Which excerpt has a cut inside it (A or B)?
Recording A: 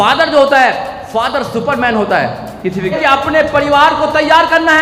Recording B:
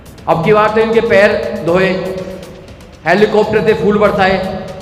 A